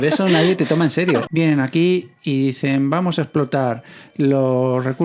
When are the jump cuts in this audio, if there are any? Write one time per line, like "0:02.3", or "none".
0:01.3